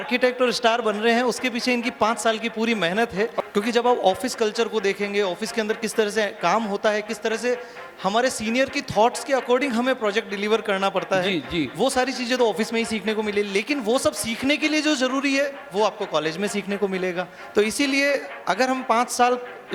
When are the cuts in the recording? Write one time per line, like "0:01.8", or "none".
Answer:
0:03.4
0:17.3